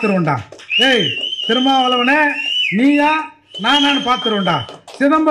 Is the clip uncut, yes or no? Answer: yes